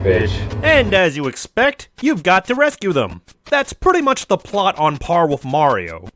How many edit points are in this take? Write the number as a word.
one